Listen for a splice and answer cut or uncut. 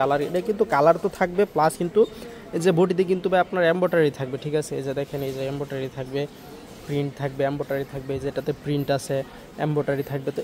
uncut